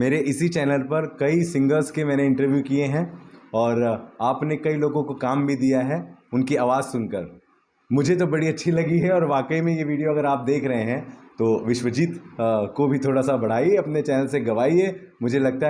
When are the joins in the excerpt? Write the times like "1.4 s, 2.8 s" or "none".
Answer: none

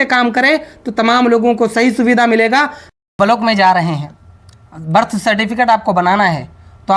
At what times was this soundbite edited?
2.9 s

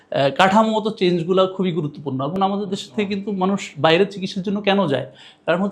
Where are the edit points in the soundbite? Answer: 2.3 s

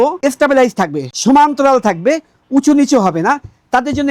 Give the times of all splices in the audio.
none

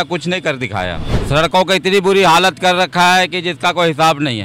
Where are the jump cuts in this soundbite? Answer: 1.1 s

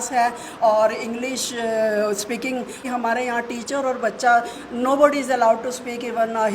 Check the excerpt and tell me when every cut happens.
2.8 s

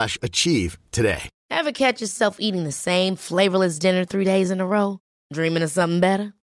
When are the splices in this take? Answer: 1.3 s

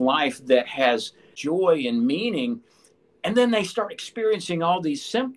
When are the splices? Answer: 1.3 s

